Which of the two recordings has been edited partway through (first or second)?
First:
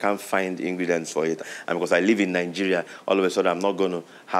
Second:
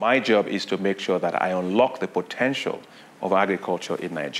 first